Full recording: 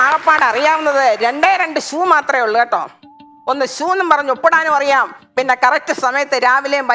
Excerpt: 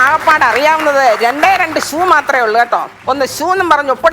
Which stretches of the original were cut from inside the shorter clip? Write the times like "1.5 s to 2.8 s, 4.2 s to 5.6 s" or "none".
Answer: 2.9 s to 3.3 s